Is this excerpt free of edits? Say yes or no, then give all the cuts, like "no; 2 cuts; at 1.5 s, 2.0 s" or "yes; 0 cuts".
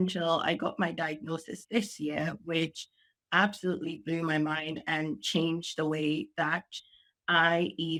yes; 0 cuts